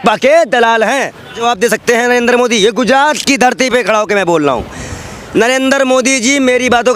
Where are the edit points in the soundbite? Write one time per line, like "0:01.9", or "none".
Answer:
0:01.4